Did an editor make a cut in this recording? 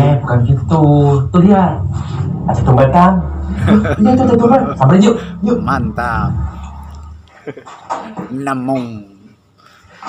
no; 0 cuts

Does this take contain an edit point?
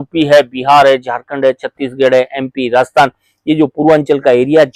no; 0 cuts

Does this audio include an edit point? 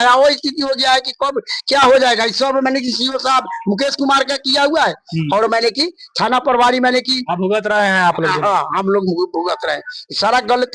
no; 0 cuts

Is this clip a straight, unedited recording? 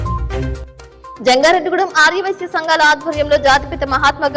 yes; 0 cuts

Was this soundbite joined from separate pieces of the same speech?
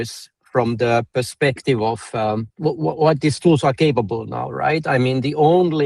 yes; 1 cut; at 2.5 s

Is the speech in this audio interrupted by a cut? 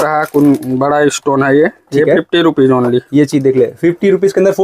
no; 0 cuts

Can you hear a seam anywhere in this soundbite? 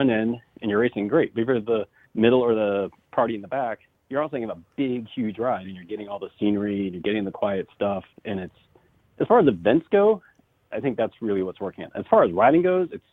yes; 3 cuts; at 2.0 s, 3.0 s, 3.9 s

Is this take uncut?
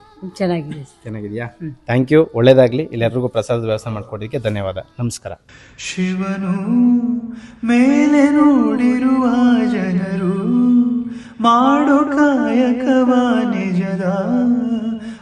yes; 0 cuts

